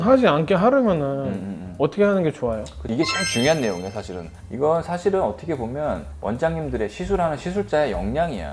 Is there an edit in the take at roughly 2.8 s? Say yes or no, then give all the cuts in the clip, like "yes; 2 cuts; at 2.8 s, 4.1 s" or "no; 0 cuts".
yes; 1 cut; at 2.8 s